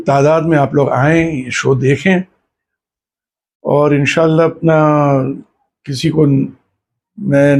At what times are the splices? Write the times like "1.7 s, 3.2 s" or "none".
none